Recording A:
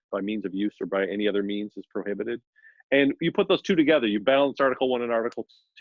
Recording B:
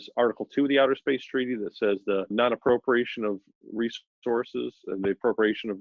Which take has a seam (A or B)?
B